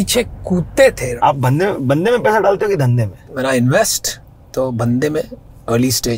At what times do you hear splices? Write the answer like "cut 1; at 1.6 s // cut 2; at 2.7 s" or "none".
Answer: cut 1; at 1.1 s // cut 2; at 3.2 s